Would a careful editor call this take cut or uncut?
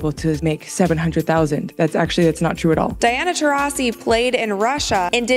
cut